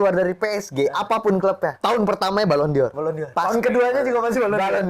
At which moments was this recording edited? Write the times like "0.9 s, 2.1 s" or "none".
1.8 s, 3.2 s